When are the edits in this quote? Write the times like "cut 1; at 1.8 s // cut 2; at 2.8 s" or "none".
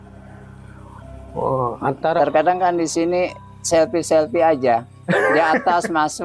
cut 1; at 2.2 s